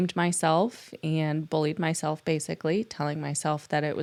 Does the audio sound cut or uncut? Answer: uncut